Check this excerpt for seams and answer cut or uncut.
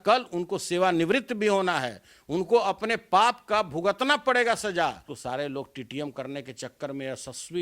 cut